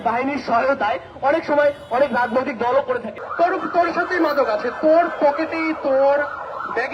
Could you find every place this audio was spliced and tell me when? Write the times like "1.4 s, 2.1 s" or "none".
3.2 s